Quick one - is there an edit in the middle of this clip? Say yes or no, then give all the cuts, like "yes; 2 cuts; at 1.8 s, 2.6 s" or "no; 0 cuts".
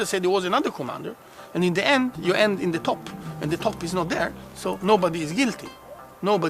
yes; 1 cut; at 5.5 s